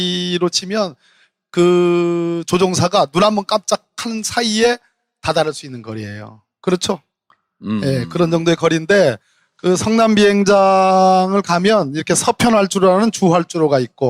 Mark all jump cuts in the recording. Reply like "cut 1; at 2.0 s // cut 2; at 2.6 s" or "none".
none